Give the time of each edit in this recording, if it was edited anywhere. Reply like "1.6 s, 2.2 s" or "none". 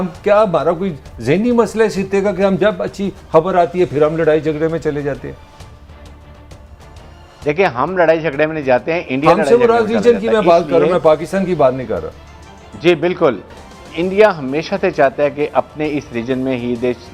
none

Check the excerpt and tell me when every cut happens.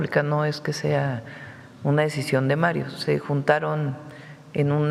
none

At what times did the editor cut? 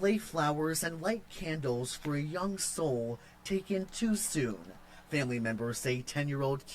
5.4 s

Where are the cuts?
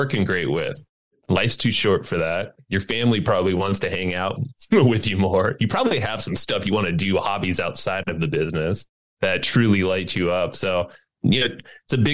1.0 s

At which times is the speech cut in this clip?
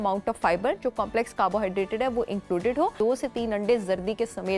2.9 s

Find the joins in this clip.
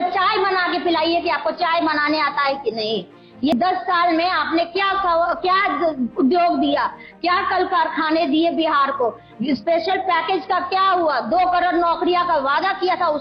3.5 s

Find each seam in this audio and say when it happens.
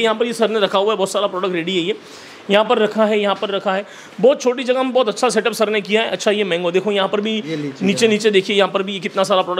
none

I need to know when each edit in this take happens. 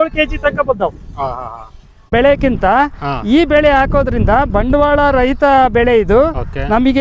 2.0 s

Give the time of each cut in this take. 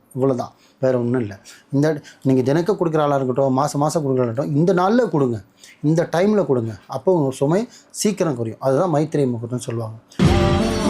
10.0 s

